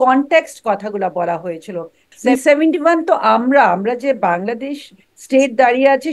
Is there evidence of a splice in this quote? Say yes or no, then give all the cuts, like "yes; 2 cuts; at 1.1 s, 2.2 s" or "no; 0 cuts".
yes; 1 cut; at 2.1 s